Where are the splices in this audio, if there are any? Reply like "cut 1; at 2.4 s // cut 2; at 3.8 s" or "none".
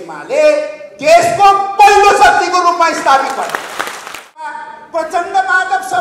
cut 1; at 4.5 s